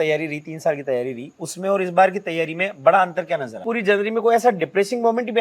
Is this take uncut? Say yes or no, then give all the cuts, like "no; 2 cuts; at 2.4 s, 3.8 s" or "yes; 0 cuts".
no; 1 cut; at 3.6 s